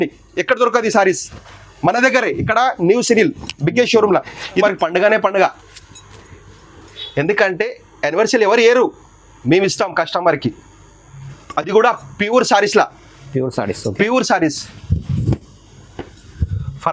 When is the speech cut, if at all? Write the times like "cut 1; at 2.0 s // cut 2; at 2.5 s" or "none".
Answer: cut 1; at 4.6 s